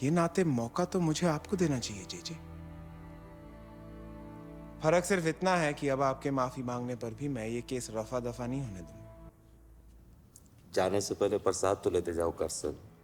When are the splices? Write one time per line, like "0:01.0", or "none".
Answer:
0:09.3